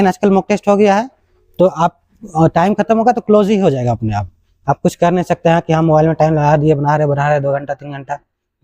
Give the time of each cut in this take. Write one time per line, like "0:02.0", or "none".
none

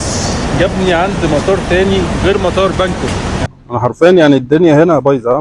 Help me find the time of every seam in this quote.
0:03.4

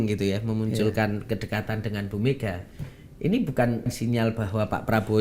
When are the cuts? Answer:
0:03.9

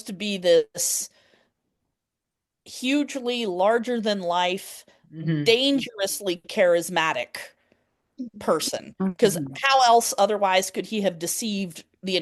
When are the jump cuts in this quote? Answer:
none

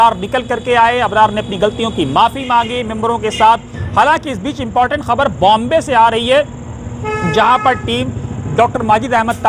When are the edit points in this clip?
0:03.8

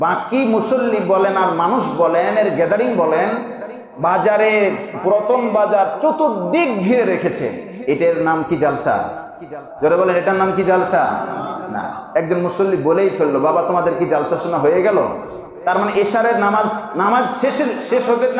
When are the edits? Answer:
0:12.0

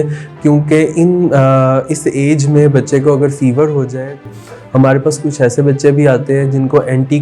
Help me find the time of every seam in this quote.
0:04.3

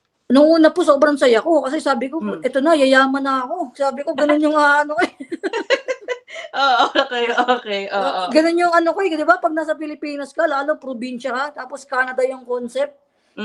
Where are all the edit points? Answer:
none

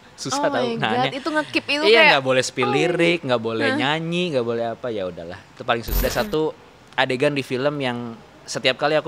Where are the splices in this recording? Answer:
0:06.0

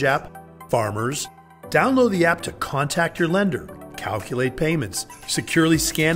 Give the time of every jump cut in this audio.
none

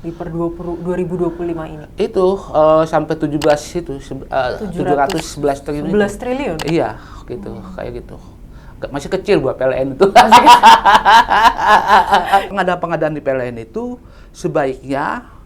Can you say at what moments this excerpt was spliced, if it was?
0:12.5

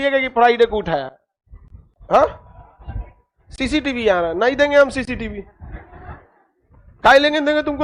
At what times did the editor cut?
none

